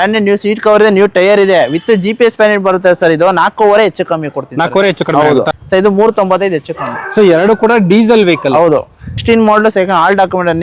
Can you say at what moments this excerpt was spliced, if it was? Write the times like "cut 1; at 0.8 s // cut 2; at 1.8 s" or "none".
cut 1; at 5.6 s // cut 2; at 9.1 s